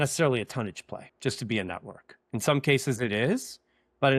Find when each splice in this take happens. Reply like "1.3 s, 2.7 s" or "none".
1.1 s